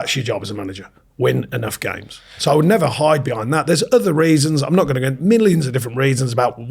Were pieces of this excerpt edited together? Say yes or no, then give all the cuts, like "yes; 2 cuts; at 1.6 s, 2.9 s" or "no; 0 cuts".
no; 0 cuts